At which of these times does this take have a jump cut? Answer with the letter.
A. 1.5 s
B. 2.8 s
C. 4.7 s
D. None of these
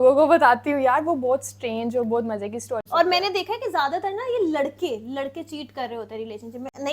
B